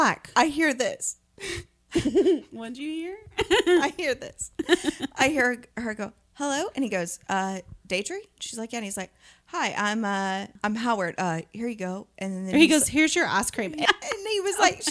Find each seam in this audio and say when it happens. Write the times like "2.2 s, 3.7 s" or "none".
10.5 s, 13.8 s

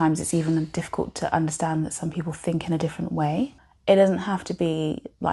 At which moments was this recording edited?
3.7 s

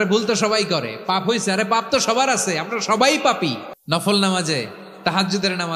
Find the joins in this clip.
3.7 s

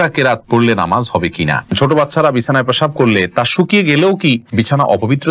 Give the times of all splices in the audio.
1.7 s, 4.5 s

